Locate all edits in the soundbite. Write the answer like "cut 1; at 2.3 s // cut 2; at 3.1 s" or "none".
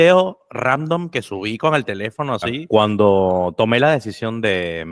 cut 1; at 2.6 s